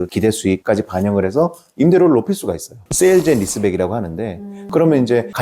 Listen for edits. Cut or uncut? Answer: cut